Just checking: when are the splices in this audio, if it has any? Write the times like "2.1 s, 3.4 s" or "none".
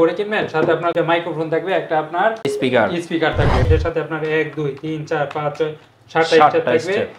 0.9 s, 3.7 s